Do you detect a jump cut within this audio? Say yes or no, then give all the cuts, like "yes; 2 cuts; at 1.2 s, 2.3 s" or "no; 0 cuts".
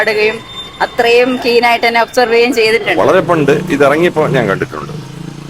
yes; 1 cut; at 2.9 s